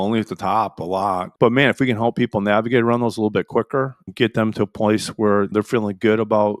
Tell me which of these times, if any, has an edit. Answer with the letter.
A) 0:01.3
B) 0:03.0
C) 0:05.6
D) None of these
A